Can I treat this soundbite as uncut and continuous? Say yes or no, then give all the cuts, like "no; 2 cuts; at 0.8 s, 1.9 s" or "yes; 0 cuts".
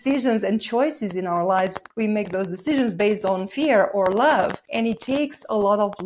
no; 2 cuts; at 1.8 s, 4.6 s